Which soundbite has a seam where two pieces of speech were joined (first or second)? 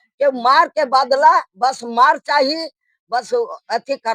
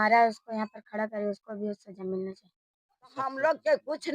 second